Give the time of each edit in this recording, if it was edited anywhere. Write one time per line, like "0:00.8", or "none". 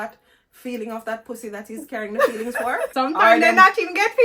0:02.9